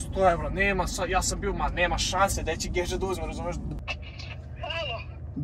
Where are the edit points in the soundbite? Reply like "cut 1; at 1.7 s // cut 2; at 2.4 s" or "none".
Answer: cut 1; at 3.7 s